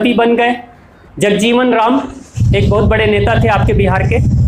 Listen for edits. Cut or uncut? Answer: cut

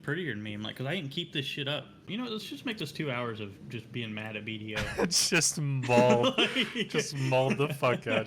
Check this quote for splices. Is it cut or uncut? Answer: cut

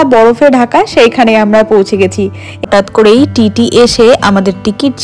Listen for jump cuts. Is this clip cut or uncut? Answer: cut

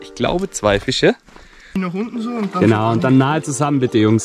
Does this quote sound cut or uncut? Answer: cut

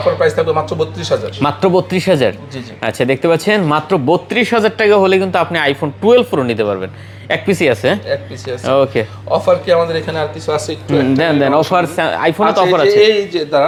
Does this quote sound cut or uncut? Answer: uncut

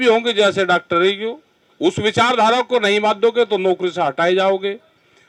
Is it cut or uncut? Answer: uncut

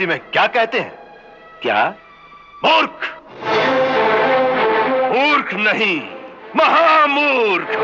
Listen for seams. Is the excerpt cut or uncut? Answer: uncut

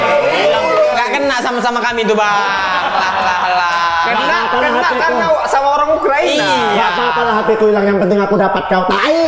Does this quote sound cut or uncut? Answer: cut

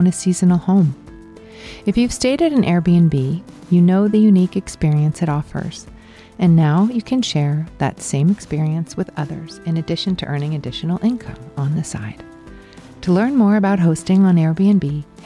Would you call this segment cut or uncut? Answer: uncut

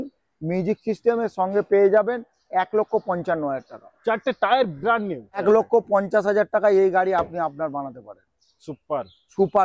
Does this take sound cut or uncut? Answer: cut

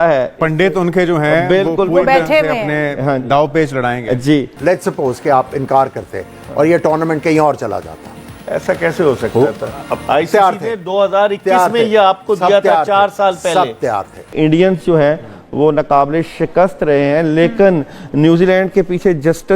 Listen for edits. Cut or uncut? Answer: cut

